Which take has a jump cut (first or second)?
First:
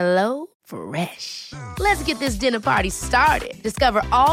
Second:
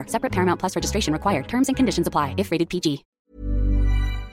second